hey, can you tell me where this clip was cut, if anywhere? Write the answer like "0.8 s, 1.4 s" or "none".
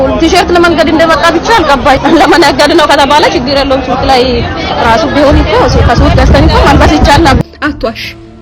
2.0 s, 7.4 s